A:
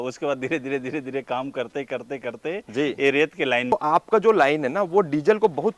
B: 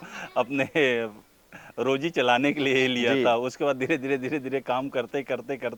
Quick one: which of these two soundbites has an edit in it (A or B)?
A